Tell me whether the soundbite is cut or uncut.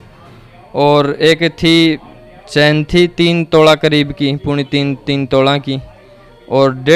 uncut